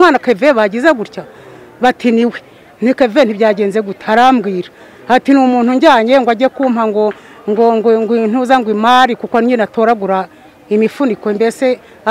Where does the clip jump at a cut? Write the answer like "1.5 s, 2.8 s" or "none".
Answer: none